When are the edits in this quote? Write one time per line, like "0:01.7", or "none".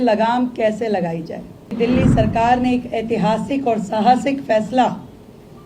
0:01.7